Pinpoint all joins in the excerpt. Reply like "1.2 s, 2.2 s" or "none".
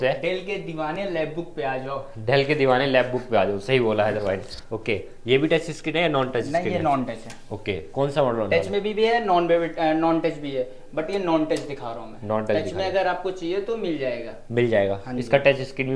none